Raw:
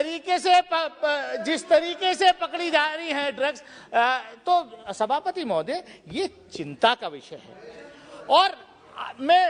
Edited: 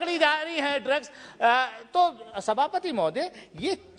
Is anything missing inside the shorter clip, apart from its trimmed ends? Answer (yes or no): no